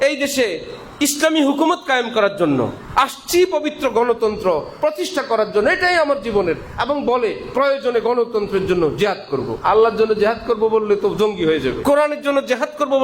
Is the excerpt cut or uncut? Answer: cut